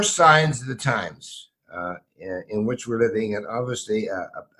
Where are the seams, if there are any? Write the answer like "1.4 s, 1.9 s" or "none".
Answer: none